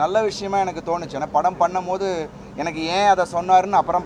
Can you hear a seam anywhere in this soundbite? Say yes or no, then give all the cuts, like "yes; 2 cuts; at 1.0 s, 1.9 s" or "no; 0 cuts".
no; 0 cuts